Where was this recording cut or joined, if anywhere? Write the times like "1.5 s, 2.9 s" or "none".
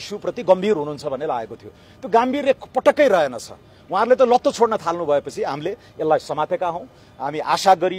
none